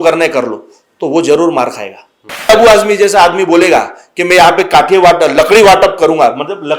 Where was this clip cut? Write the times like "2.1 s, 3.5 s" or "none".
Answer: 2.5 s